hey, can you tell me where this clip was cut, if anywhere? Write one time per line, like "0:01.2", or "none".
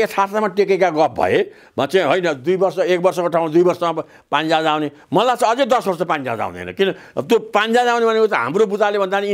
none